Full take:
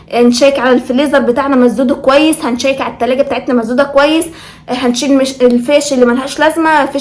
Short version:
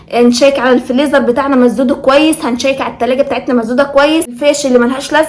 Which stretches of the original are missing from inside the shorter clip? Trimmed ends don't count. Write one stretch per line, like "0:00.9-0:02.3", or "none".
0:04.4-0:05.6